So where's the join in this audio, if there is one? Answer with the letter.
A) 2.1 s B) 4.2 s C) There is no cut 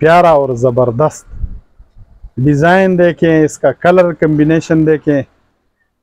C